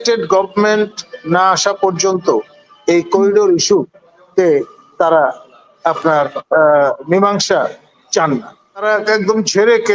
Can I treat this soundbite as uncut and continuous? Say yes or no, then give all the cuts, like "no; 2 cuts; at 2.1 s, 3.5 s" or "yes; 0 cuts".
no; 1 cut; at 8.8 s